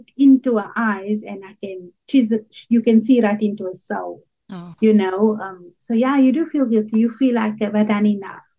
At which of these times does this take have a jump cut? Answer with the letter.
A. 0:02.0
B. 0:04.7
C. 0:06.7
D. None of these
D